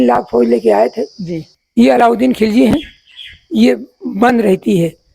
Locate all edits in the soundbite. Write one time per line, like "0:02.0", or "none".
0:01.5